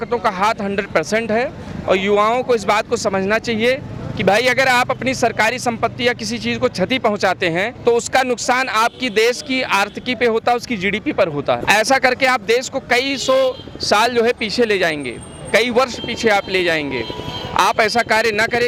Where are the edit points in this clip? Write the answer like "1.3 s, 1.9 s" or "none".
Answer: none